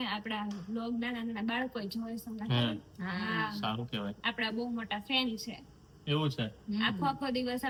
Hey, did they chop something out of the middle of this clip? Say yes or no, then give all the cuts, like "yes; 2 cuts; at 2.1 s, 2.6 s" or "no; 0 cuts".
no; 0 cuts